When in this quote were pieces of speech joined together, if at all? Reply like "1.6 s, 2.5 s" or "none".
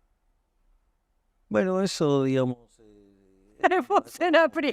none